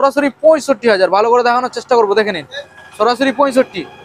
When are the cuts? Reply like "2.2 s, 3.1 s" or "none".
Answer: none